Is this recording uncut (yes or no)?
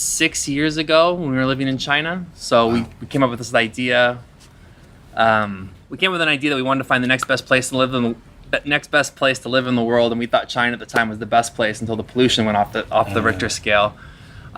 yes